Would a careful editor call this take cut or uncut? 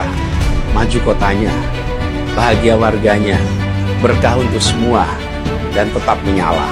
uncut